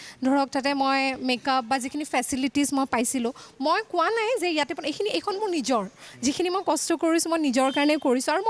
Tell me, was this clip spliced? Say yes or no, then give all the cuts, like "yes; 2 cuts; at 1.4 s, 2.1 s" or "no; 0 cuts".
no; 0 cuts